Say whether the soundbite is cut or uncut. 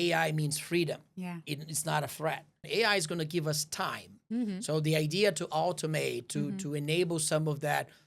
cut